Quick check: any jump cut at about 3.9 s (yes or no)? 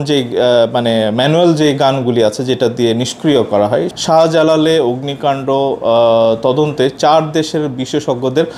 yes